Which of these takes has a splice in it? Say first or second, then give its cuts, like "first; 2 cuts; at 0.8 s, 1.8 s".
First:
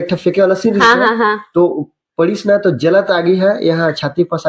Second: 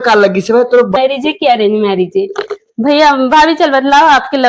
second; 1 cut; at 1.0 s